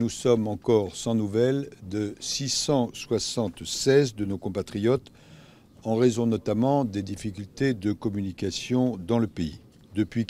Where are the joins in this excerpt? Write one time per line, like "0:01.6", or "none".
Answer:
0:07.1

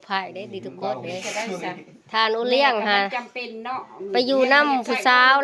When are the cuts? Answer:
none

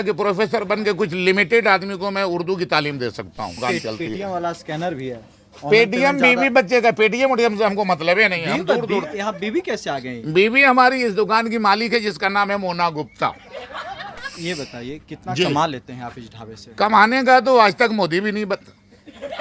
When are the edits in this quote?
0:03.6
0:14.3

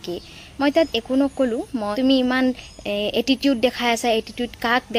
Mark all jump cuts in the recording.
0:01.9

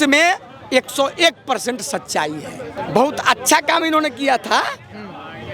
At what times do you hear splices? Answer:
0:02.7

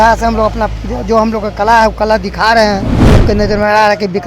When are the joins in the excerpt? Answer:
0:03.2

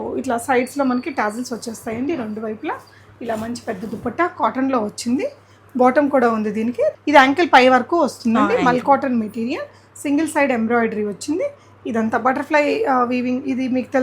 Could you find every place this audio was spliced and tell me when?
0:07.0

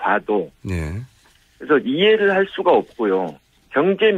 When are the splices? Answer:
0:01.2

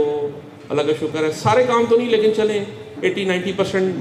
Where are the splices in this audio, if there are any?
none

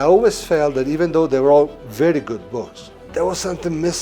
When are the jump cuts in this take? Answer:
none

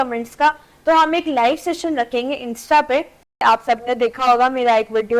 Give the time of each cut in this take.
0:03.4

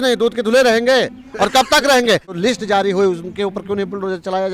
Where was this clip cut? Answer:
0:02.3

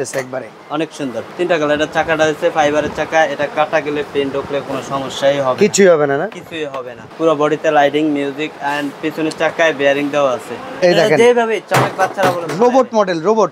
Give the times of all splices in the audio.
0:01.2
0:07.0
0:10.6

